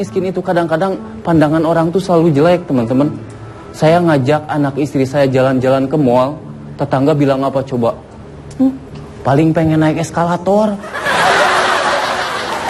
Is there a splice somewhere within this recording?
no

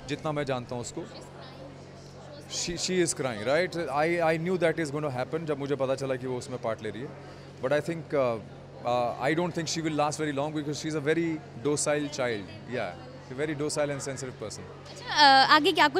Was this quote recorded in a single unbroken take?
yes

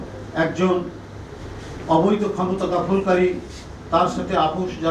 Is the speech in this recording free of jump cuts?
yes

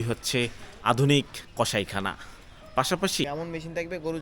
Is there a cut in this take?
yes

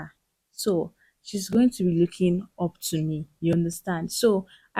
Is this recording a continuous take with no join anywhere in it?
yes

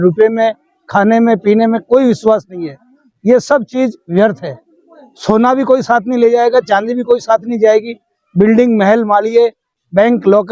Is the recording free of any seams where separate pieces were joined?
yes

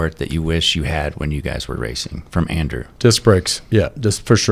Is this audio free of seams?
no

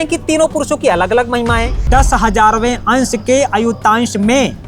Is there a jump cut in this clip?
yes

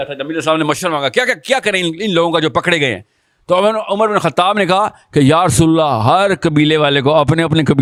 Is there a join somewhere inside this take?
no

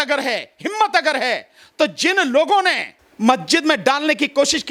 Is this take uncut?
yes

